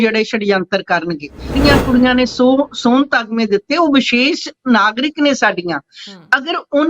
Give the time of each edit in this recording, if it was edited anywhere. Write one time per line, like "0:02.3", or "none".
0:01.6